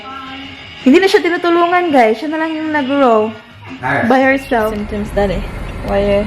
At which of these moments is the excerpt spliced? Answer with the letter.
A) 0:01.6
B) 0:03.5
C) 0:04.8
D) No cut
C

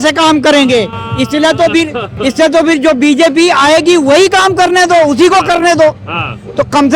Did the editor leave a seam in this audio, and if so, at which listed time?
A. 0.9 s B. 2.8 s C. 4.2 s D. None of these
D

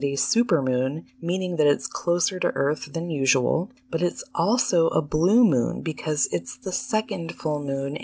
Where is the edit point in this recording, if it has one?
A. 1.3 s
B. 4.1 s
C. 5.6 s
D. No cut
D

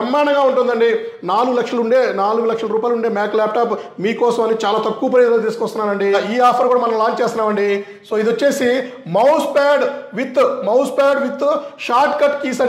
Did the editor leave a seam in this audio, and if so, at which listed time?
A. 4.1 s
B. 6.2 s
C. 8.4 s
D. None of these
B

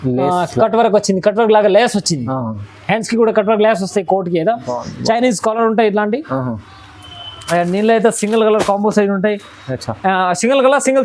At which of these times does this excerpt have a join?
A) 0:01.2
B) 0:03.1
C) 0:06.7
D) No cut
D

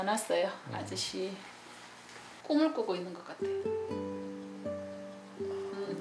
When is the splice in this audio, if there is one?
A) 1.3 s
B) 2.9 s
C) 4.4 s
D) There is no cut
D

